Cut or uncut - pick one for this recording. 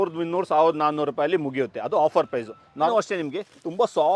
cut